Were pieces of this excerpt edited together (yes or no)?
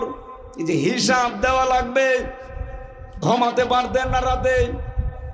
no